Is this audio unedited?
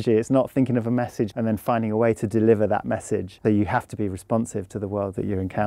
no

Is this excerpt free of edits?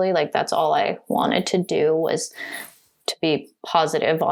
yes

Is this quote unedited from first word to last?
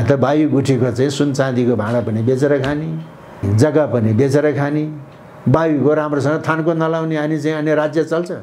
no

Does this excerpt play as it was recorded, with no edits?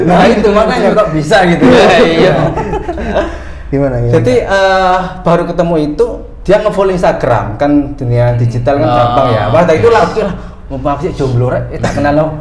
yes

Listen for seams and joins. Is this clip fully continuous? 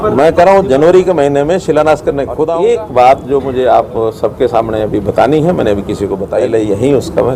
no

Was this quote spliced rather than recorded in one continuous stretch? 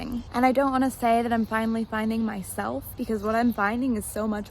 yes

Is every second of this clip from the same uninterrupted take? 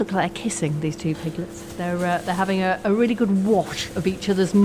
yes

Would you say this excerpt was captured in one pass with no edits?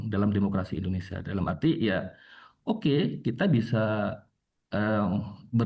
yes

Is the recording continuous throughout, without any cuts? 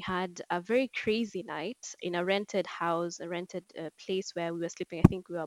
yes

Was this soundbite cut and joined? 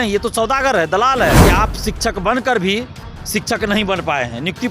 yes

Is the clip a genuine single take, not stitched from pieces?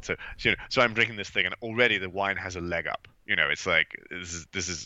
yes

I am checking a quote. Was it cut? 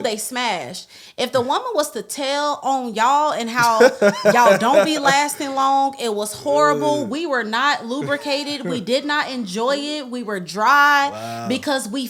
no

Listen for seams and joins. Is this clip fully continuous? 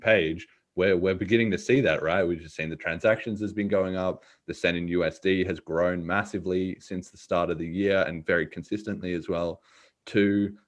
yes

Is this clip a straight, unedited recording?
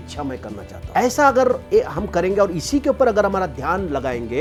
yes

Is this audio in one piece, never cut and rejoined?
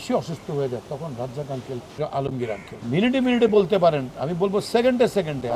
no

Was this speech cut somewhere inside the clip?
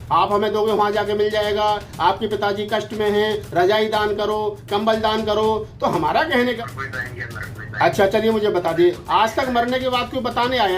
yes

